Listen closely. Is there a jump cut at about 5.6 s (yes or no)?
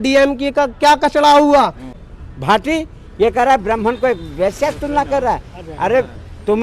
no